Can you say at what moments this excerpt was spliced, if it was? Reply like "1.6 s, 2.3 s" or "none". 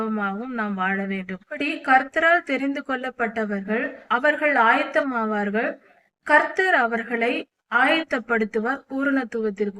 1.6 s, 4.0 s